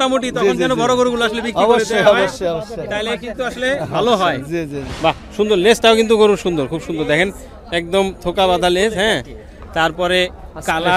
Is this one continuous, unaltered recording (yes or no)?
no